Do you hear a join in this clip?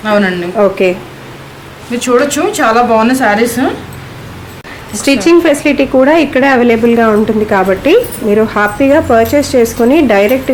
yes; 1 cut; at 4.7 s

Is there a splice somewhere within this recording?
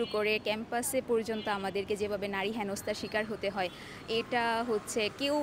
no; 0 cuts

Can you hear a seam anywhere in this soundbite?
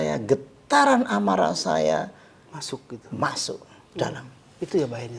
no; 0 cuts

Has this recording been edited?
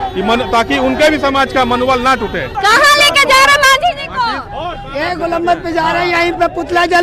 yes; 1 cut; at 2.5 s

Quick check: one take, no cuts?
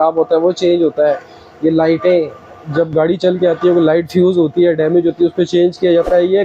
yes; 0 cuts

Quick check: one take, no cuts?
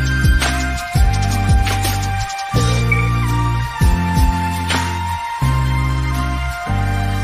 yes; 0 cuts

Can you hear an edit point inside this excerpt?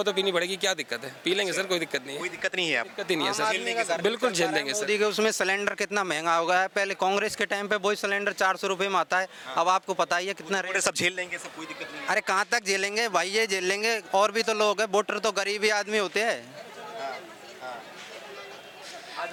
no; 0 cuts

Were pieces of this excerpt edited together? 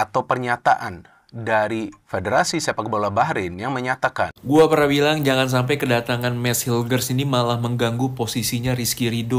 yes; 1 cut; at 4.5 s

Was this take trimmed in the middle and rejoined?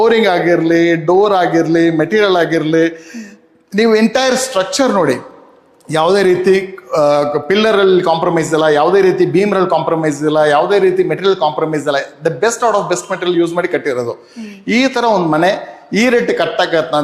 no; 0 cuts

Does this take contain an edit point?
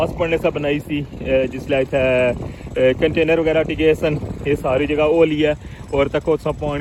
no; 0 cuts

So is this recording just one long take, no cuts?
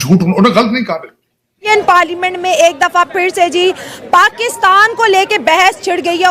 no; 1 cut; at 1.7 s

